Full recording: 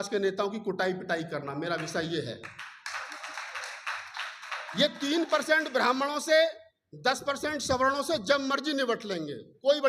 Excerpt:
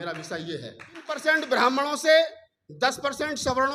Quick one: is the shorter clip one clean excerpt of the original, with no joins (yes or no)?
no